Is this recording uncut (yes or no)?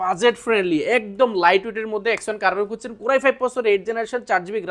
yes